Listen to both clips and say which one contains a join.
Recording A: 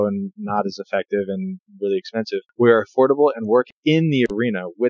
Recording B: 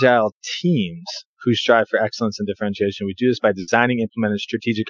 A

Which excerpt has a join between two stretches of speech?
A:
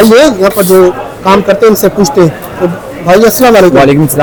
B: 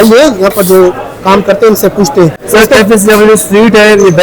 B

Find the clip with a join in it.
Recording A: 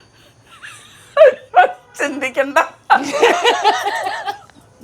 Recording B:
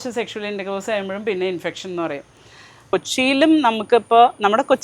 B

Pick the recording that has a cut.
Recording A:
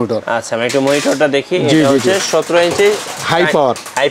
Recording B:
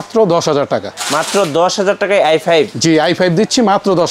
B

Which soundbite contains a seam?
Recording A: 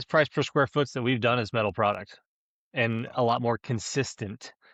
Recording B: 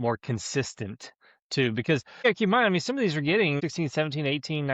B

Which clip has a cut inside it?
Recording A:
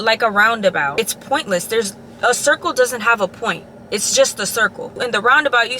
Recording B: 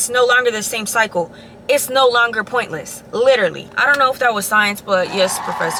A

